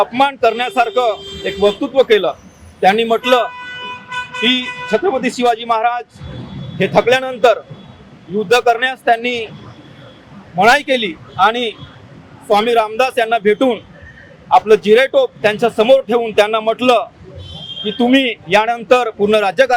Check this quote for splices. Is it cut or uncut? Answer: uncut